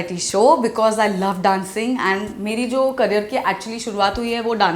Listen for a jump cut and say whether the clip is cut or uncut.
uncut